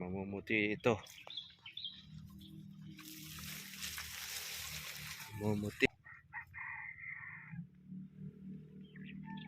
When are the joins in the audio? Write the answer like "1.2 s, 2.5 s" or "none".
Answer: 5.9 s